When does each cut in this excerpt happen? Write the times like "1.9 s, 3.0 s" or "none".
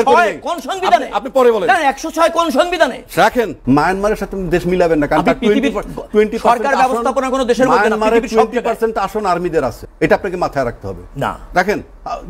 3.6 s, 9.8 s